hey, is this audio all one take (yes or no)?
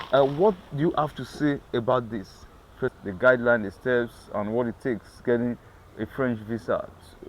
no